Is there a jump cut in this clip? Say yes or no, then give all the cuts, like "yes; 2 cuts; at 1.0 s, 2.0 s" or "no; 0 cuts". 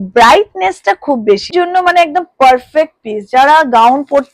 yes; 1 cut; at 1.5 s